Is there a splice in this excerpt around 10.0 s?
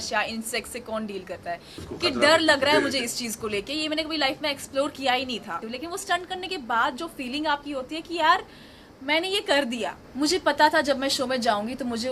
yes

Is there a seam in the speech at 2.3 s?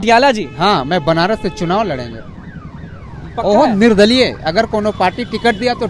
no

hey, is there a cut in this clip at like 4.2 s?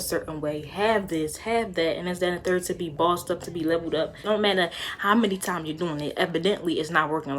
yes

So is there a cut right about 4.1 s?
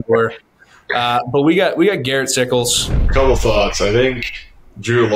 no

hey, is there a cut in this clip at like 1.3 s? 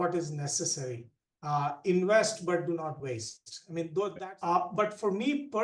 no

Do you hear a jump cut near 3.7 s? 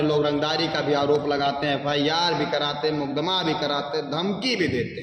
no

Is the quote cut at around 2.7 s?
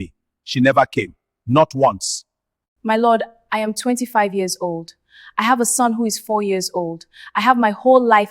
yes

